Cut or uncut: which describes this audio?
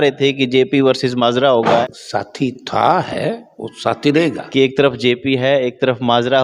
cut